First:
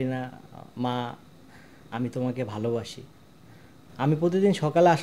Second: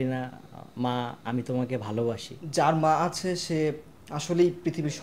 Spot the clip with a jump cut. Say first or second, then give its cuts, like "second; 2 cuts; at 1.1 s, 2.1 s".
second; 2 cuts; at 1.2 s, 2.4 s